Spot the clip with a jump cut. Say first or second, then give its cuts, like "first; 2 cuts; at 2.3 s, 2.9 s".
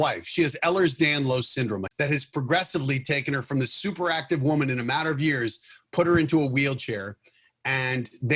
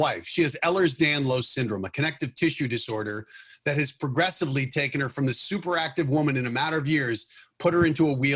first; 1 cut; at 1.9 s